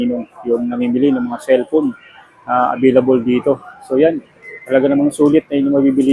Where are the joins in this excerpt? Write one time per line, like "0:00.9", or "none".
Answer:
none

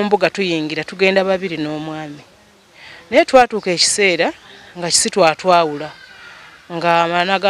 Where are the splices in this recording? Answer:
none

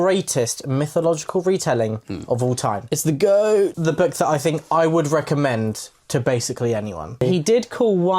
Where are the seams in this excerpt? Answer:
0:03.8
0:07.2

